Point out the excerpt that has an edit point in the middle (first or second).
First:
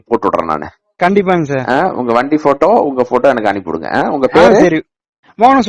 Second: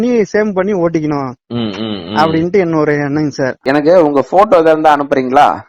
second